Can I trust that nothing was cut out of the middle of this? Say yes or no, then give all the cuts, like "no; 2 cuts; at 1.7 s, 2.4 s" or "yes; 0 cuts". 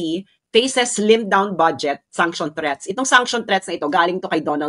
yes; 0 cuts